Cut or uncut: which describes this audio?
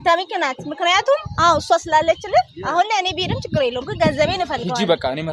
uncut